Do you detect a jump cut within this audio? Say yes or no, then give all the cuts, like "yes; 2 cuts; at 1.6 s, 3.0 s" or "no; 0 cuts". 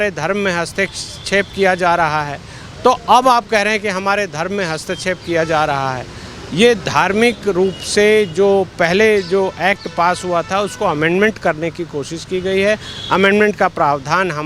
no; 0 cuts